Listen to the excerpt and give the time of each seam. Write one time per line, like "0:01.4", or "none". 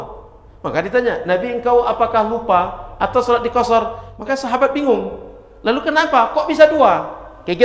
0:04.0